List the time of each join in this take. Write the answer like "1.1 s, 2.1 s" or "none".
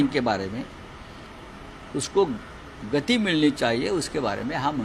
none